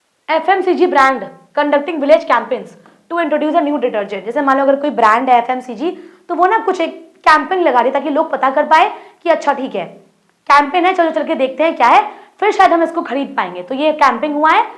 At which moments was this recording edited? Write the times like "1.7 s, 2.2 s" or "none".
none